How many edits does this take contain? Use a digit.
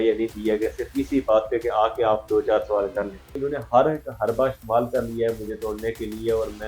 1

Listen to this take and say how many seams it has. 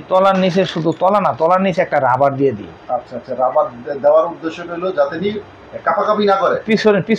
0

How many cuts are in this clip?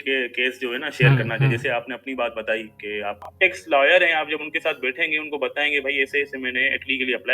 1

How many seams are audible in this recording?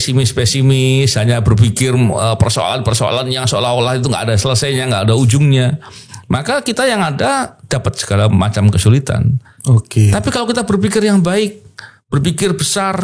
0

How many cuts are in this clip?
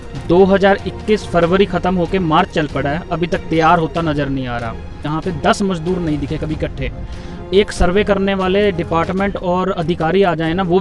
1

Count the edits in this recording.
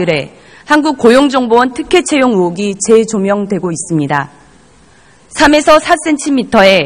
1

